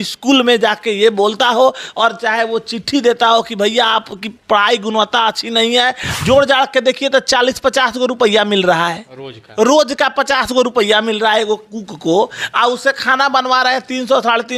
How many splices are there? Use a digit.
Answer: 1